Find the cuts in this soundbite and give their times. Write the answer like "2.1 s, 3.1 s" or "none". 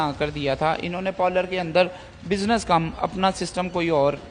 none